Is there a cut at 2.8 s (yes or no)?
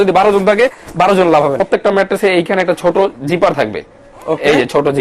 no